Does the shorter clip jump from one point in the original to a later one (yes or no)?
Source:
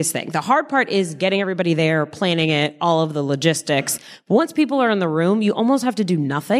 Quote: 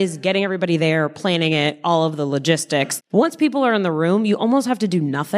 yes